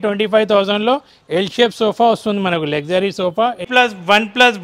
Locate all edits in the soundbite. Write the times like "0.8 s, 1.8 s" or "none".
3.6 s